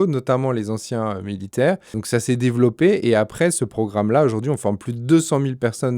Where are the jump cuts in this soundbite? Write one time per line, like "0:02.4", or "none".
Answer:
0:02.0